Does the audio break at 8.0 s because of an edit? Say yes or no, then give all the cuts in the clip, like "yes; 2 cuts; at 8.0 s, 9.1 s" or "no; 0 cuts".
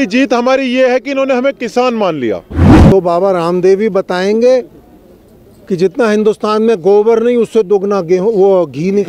no; 1 cut; at 2.7 s